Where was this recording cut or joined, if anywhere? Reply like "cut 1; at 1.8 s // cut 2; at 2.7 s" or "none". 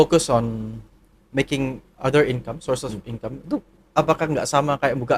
none